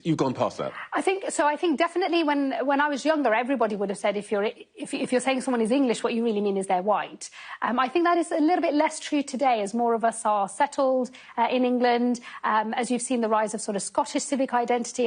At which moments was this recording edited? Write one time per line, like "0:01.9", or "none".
0:12.3